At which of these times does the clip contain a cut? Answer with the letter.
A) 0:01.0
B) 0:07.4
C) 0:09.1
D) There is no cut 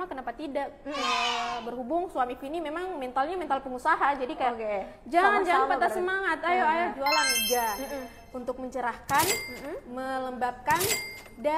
B